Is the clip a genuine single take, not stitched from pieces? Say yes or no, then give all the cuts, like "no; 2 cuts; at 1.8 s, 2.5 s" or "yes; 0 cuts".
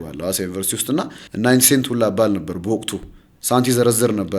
no; 1 cut; at 1.2 s